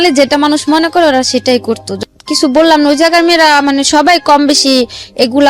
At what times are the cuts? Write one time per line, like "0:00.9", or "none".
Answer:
0:01.9